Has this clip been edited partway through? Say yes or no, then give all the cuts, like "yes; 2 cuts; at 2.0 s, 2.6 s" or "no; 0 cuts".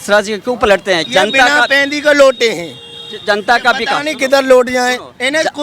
yes; 1 cut; at 1.0 s